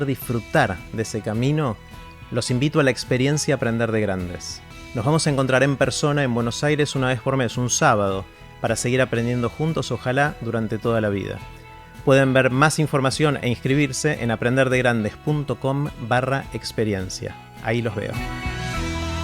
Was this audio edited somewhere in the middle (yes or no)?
yes